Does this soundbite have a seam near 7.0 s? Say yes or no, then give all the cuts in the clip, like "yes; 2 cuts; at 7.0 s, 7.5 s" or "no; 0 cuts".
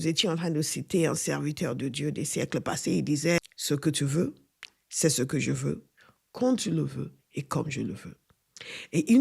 no; 1 cut; at 3.4 s